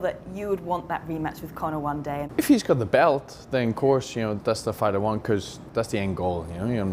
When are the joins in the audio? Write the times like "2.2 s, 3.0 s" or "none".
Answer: 2.3 s, 4.3 s, 5.6 s